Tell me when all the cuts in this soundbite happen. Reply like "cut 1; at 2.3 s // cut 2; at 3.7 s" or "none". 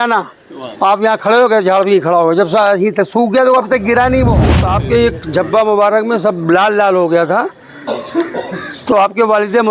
cut 1; at 4.5 s

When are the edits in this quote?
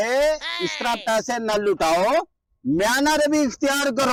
none

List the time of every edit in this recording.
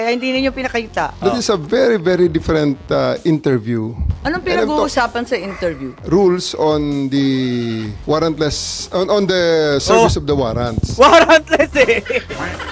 cut 1; at 1.1 s // cut 2; at 4.2 s // cut 3; at 6.0 s

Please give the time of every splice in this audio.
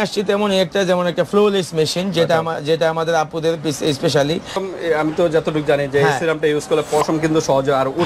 cut 1; at 4.6 s

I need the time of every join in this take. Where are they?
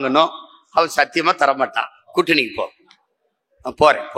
cut 1; at 2.0 s

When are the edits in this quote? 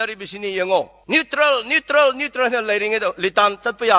none

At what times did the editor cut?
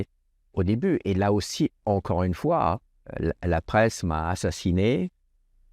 cut 1; at 3.1 s

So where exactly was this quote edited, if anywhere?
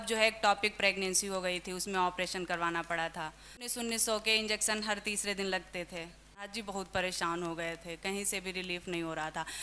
cut 1; at 3.7 s // cut 2; at 6.5 s

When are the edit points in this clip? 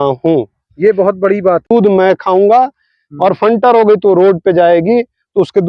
cut 1; at 1.7 s

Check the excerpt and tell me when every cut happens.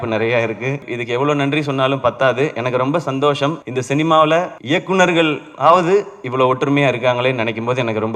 cut 1; at 0.9 s // cut 2; at 3.7 s // cut 3; at 4.6 s

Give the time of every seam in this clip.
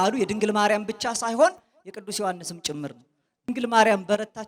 cut 1; at 3.5 s

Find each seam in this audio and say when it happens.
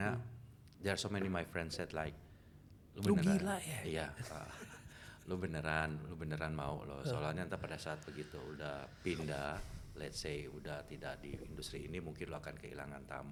none

